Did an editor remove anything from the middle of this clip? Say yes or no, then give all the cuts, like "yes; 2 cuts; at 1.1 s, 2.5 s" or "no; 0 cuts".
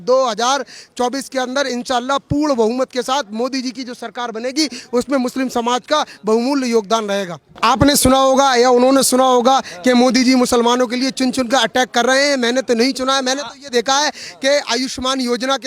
yes; 1 cut; at 7.4 s